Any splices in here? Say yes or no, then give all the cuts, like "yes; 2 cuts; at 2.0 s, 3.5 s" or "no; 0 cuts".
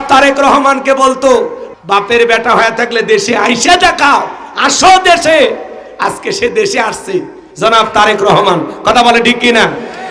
yes; 1 cut; at 1.6 s